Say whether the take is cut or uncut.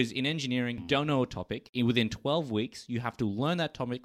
cut